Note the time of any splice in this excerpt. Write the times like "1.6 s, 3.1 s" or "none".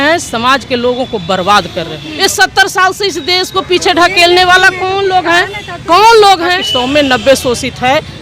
2.0 s, 6.7 s

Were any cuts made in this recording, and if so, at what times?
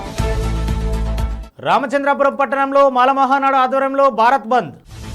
1.4 s

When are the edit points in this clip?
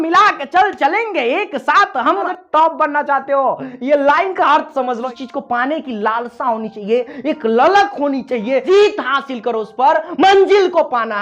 2.3 s, 5.1 s, 8.6 s

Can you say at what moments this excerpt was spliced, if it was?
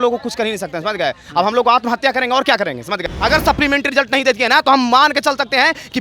3.0 s

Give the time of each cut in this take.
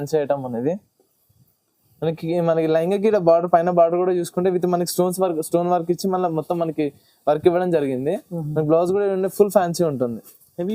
none

